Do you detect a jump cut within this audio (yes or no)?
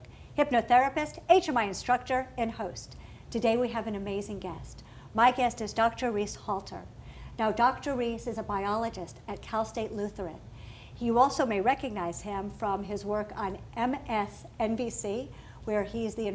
no